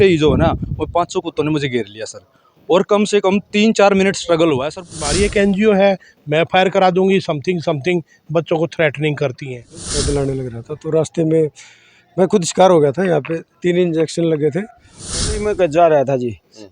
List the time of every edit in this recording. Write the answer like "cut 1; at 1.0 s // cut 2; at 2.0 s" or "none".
cut 1; at 4.8 s // cut 2; at 9.9 s // cut 3; at 15.3 s